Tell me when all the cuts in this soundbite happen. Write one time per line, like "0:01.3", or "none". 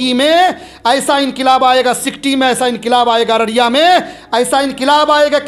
none